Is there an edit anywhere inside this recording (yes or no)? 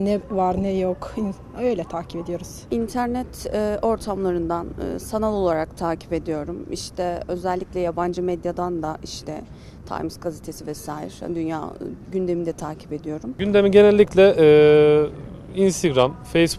yes